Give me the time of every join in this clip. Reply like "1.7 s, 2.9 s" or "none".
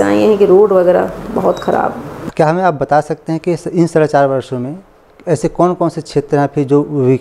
2.2 s